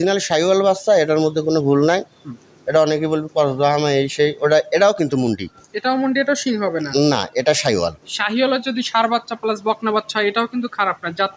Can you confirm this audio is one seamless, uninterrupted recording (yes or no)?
yes